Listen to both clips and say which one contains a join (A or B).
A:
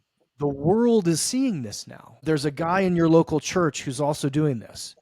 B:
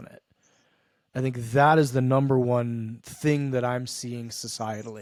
A